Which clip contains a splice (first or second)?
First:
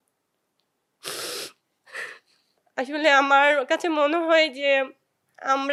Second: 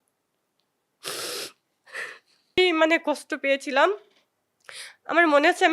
second